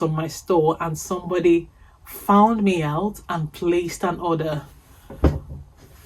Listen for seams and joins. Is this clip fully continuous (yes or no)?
yes